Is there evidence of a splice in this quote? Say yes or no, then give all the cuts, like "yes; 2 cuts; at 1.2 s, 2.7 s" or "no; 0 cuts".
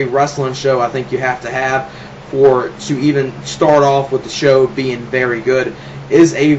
yes; 1 cut; at 3.8 s